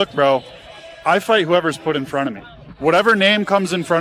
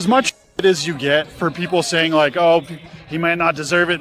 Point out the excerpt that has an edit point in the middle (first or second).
second